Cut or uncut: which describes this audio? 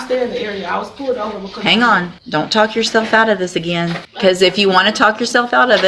cut